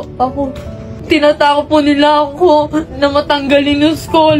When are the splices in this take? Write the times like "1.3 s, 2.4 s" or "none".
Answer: 0.9 s